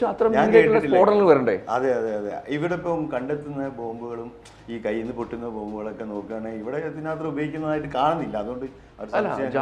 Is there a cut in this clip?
no; 0 cuts

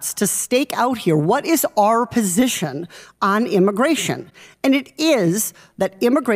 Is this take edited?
no; 0 cuts

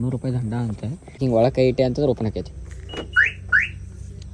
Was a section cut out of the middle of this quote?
yes; 1 cut; at 1.1 s

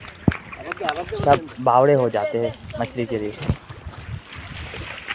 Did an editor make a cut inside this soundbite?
no; 0 cuts

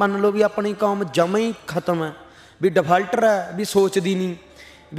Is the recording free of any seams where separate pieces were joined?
yes; 0 cuts

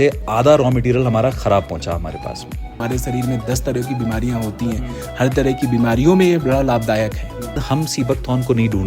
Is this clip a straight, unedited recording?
no; 2 cuts; at 2.8 s, 7.6 s

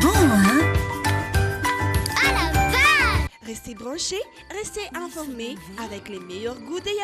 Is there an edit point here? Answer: no; 0 cuts

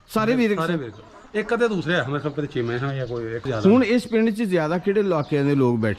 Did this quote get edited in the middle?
no; 0 cuts

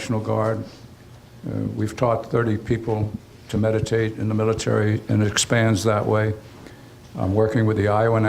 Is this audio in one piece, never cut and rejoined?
no; 1 cut; at 2.8 s

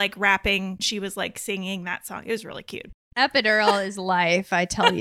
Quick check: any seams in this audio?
yes; 2 cuts; at 0.9 s, 3.1 s

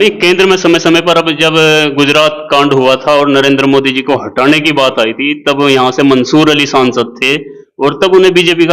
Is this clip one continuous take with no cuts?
yes; 0 cuts

